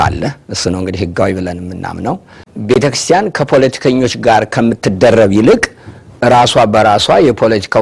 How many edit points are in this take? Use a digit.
1